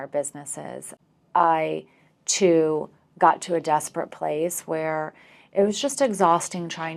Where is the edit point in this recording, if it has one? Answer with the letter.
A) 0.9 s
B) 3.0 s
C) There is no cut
A